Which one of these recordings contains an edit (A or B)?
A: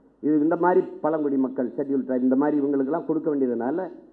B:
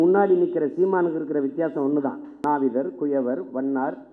B